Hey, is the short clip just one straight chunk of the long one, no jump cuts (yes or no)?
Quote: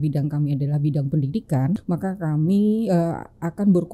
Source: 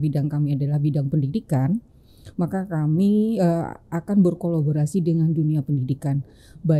no